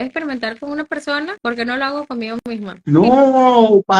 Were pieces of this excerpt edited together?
yes; 2 cuts; at 1.4 s, 2.7 s

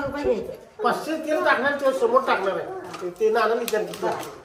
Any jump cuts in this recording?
no; 0 cuts

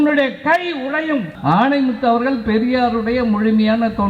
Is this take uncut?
no; 1 cut; at 1.3 s

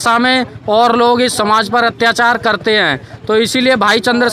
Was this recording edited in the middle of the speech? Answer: no; 0 cuts

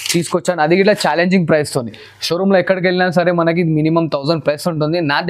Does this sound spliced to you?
no; 0 cuts

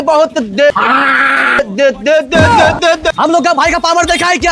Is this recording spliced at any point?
yes; 1 cut; at 3.1 s

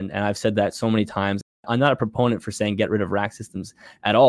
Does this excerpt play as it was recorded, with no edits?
no; 1 cut; at 1.6 s

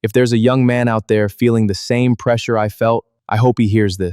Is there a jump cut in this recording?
yes; 1 cut; at 3.1 s

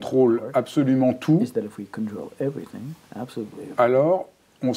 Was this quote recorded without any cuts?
yes; 0 cuts

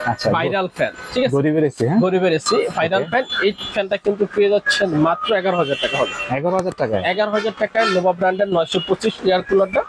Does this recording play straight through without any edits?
yes; 0 cuts

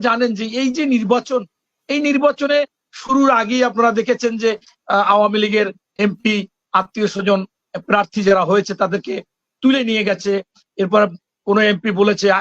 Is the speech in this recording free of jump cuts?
yes; 0 cuts

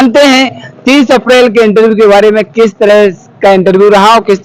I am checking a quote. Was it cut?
no; 0 cuts

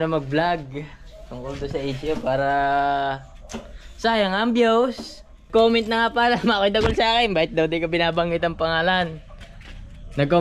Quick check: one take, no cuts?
no; 1 cut; at 5.5 s

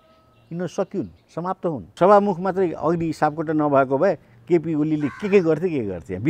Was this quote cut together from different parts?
yes; 1 cut; at 1.9 s

